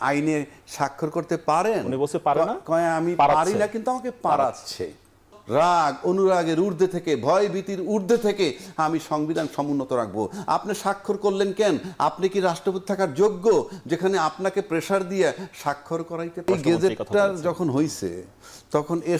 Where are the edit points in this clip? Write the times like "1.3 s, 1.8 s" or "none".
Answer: 5.4 s, 16.5 s